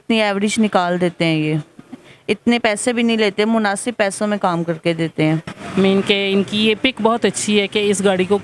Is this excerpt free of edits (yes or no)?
no